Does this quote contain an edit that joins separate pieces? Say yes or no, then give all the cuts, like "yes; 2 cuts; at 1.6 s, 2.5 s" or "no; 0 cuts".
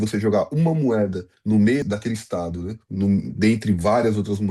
yes; 2 cuts; at 1.3 s, 1.8 s